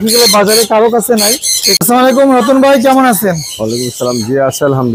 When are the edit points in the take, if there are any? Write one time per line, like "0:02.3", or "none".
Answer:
0:01.8